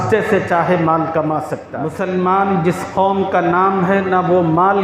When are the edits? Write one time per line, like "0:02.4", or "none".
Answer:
0:01.6